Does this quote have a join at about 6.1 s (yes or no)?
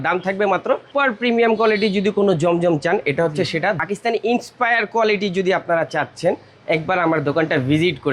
no